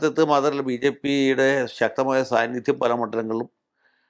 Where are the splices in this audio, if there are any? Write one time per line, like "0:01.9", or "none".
none